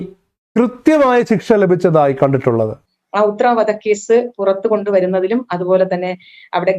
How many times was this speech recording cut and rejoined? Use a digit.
1